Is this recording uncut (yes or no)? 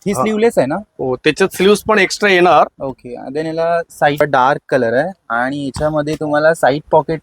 no